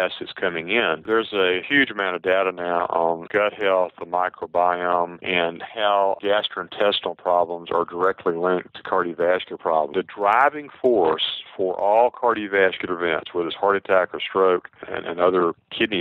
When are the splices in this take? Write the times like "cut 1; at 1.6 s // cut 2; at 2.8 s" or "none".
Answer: cut 1; at 1.1 s // cut 2; at 9.9 s